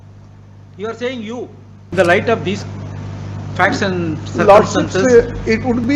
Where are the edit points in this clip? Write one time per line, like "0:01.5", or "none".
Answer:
0:01.9